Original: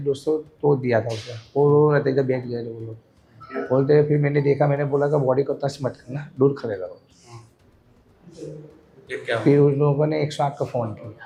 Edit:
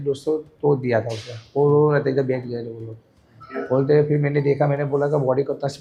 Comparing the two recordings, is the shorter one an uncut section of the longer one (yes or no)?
yes